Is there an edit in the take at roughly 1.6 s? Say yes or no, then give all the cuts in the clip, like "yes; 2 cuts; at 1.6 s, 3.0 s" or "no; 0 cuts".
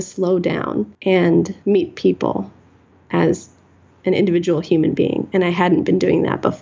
yes; 2 cuts; at 0.9 s, 1.6 s